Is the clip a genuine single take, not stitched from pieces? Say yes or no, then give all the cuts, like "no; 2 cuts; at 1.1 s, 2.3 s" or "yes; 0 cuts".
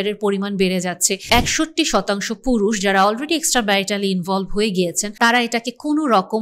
no; 2 cuts; at 1.1 s, 5.0 s